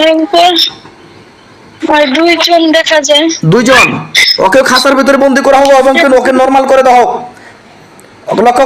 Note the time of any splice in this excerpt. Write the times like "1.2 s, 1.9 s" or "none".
none